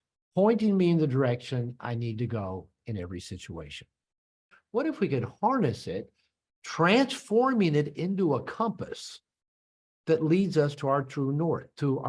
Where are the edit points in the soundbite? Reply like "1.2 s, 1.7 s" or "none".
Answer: 4.6 s